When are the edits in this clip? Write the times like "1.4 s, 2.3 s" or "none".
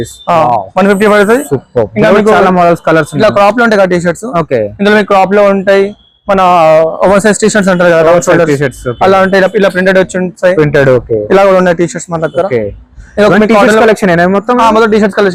none